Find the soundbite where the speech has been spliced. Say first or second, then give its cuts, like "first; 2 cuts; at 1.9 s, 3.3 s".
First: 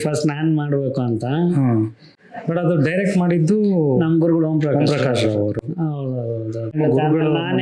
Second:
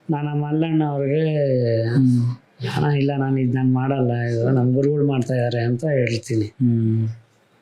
first; 1 cut; at 6.7 s